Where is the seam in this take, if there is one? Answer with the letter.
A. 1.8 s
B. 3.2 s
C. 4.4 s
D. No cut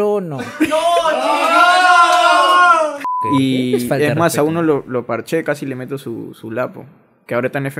B